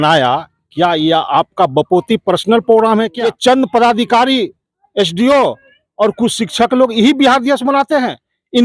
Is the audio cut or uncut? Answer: cut